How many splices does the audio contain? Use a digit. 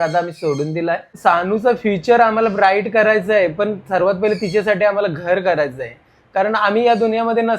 1